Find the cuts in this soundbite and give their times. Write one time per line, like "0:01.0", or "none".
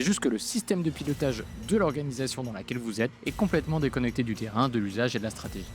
0:03.2